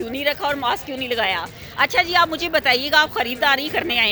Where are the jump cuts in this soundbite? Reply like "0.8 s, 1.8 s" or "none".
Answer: none